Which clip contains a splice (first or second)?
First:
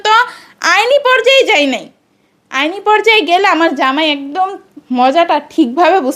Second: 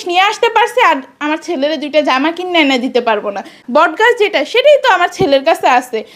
second